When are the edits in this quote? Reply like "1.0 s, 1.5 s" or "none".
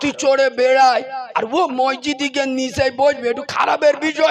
none

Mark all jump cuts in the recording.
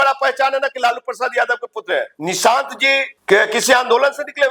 2.1 s, 3.1 s

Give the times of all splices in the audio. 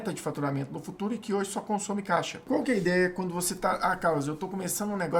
2.4 s

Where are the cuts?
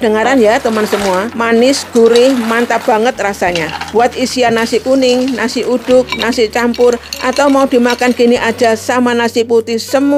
1.3 s, 3.7 s

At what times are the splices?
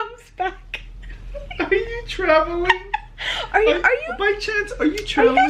none

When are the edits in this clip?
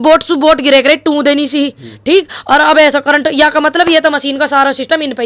none

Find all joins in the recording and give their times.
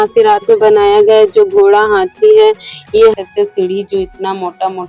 3.2 s

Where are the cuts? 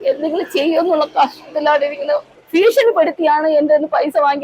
2.3 s

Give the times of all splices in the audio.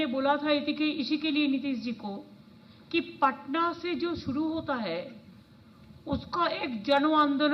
none

